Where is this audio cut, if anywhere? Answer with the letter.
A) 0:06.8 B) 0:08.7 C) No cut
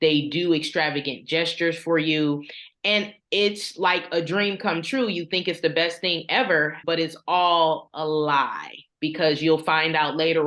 A